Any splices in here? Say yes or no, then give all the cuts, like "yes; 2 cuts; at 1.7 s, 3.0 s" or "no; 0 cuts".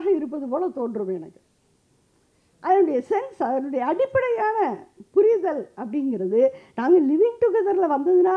no; 0 cuts